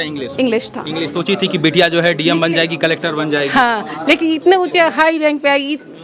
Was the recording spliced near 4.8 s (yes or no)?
no